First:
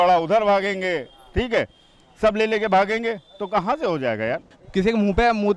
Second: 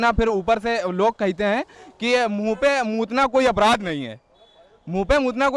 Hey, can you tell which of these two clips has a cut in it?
first; 1 cut; at 4.5 s

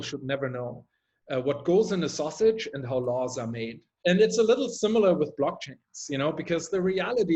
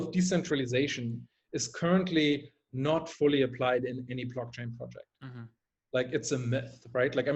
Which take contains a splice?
first; 1 cut; at 3.8 s

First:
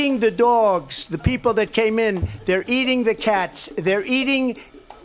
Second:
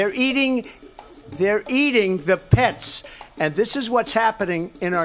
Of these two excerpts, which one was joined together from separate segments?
second; 1 cut; at 3.1 s

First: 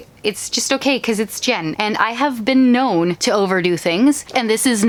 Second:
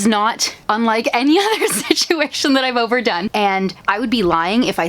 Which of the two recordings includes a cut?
second; 1 cut; at 3.7 s

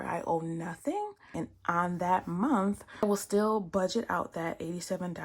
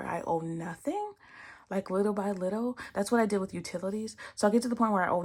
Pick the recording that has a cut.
first; 2 cuts; at 1.4 s, 3.0 s

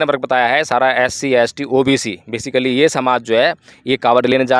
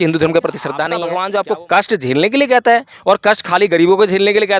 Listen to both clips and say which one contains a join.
second; 1 cut; at 1.0 s

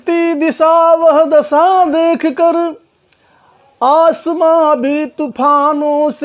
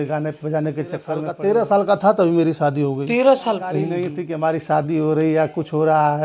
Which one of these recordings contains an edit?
second; 2 cuts; at 1.3 s, 4.1 s

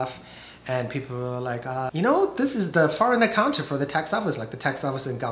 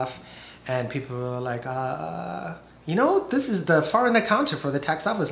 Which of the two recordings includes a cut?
first; 1 cut; at 1.9 s

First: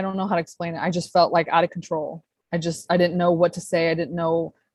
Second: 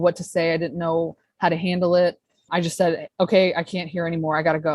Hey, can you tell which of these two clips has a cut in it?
second; 1 cut; at 2.4 s

